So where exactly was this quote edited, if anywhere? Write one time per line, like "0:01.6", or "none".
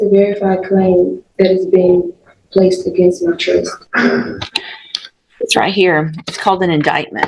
none